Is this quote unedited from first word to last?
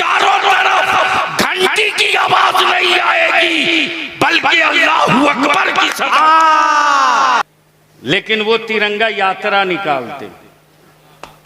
no; 1 cut; at 7.4 s

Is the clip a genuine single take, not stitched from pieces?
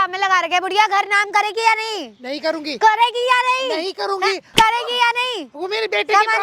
yes; 0 cuts

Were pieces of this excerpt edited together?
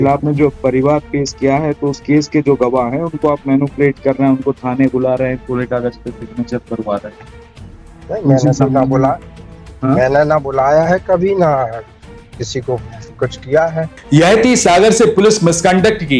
yes; 1 cut; at 14.0 s

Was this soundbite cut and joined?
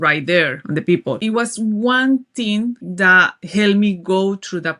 yes; 2 cuts; at 1.0 s, 2.8 s

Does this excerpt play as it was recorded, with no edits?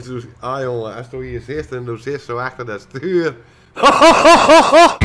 yes; 0 cuts

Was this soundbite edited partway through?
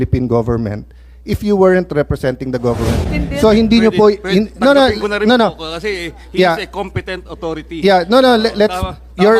yes; 1 cut; at 3.1 s

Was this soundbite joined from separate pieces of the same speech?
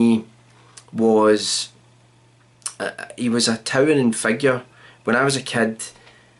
no; 0 cuts

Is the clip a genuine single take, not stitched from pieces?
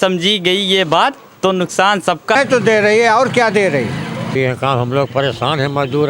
no; 2 cuts; at 2.4 s, 4.4 s

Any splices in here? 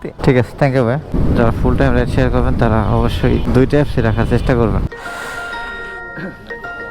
yes; 2 cuts; at 1.1 s, 4.8 s

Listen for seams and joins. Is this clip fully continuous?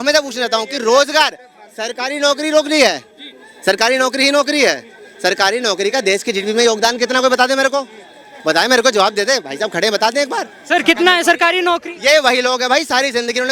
yes; 0 cuts

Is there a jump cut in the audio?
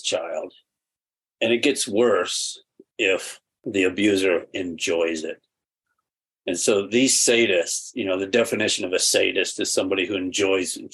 yes; 1 cut; at 3.6 s

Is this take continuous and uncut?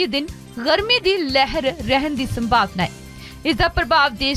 yes; 0 cuts

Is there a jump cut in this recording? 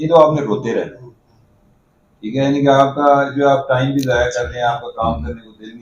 no; 0 cuts

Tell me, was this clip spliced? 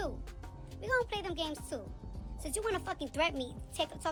no; 0 cuts

